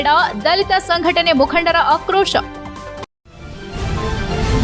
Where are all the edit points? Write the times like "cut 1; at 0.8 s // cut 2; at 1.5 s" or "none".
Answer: cut 1; at 3.1 s